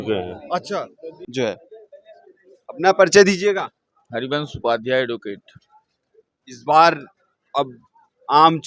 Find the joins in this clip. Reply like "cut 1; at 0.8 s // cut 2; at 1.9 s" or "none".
none